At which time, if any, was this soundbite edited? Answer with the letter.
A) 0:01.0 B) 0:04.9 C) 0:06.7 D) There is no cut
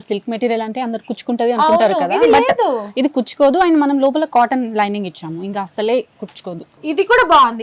C